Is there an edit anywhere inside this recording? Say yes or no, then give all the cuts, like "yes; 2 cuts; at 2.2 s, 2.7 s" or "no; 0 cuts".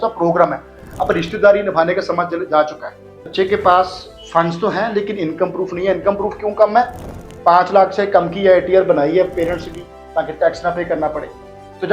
yes; 1 cut; at 3.2 s